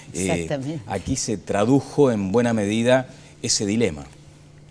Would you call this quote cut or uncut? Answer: cut